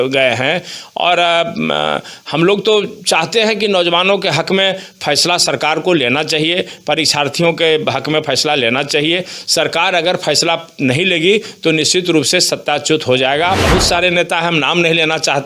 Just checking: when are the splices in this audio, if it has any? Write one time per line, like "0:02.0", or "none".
0:13.6